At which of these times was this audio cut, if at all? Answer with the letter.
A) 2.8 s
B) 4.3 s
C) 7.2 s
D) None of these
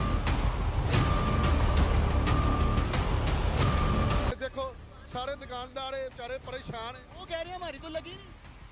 B